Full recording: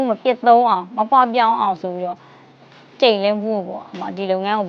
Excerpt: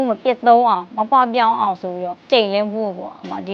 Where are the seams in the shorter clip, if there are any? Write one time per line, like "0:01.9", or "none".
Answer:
0:02.2